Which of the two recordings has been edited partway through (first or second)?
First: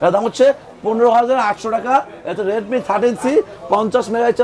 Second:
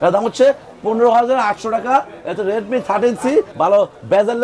second